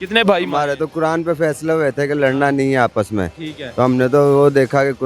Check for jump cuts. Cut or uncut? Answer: uncut